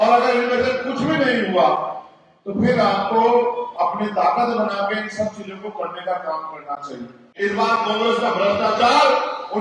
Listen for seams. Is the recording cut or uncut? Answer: cut